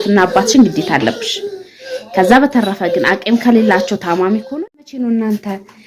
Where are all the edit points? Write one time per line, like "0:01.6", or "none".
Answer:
0:04.5